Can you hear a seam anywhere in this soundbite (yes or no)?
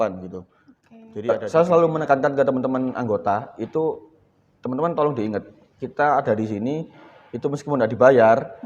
yes